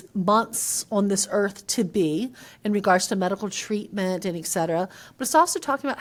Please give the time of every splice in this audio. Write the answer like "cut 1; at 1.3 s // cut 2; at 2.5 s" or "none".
none